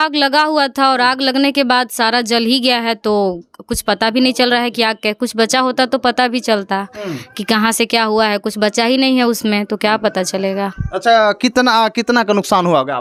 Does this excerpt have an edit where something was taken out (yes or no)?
no